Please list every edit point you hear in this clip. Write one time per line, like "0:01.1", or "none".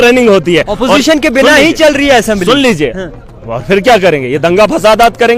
none